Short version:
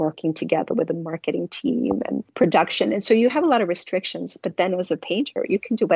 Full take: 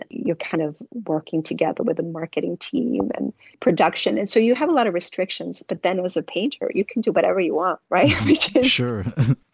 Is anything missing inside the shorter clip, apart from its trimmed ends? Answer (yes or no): yes